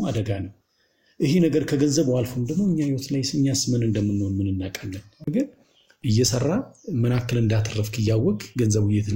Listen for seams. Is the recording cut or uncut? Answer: cut